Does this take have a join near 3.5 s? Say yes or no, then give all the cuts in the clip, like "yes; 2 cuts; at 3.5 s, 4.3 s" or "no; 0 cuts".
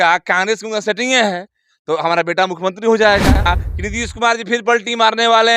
yes; 1 cut; at 3.5 s